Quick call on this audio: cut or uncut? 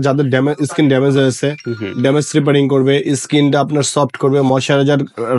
uncut